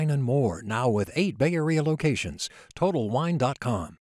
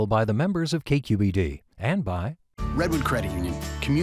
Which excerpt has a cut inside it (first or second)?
second